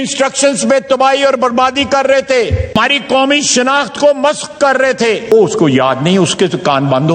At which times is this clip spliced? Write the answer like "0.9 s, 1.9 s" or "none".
2.8 s, 5.3 s